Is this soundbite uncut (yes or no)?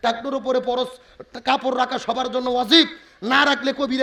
yes